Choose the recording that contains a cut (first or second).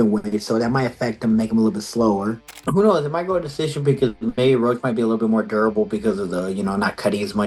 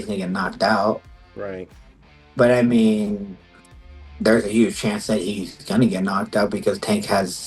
first